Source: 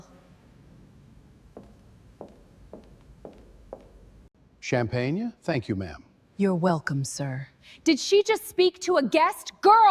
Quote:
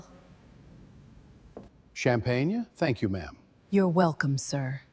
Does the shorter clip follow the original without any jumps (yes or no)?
no